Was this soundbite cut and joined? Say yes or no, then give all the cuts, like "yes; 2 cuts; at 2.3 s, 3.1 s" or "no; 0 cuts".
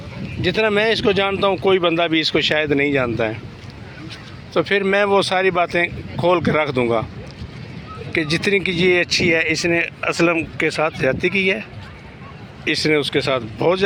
no; 0 cuts